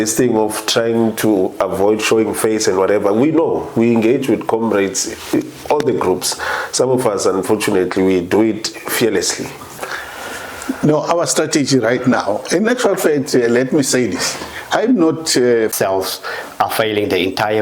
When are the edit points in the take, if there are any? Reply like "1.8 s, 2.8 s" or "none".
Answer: 9.8 s, 15.7 s